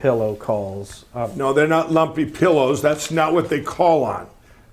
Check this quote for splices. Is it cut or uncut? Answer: cut